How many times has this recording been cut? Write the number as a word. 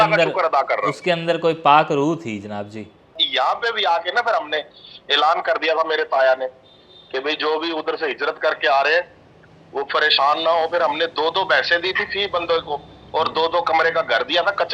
one